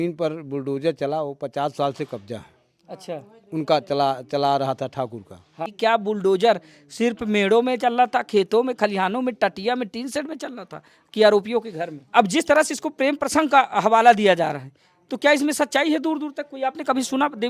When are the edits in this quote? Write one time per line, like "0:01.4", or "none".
0:05.6
0:12.1